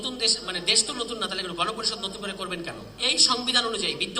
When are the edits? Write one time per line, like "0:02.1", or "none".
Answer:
0:02.9